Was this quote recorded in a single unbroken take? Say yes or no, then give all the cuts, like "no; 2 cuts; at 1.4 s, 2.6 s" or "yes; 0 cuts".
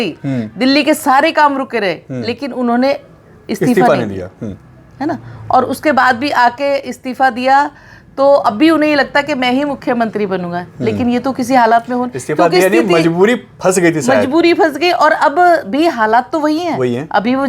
yes; 0 cuts